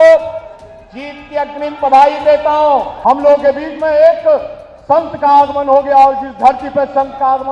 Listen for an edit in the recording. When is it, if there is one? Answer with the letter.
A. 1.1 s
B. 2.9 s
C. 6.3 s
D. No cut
B